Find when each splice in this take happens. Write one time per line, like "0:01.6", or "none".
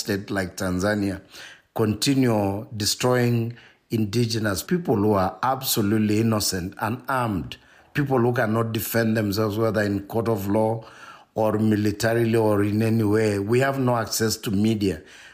0:04.6